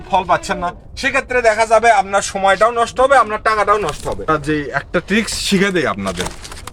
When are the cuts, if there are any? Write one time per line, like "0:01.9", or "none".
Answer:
0:04.3